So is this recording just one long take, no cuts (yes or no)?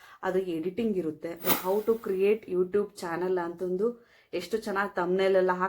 no